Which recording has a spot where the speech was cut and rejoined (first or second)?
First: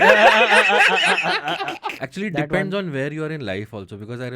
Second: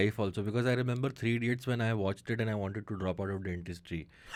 first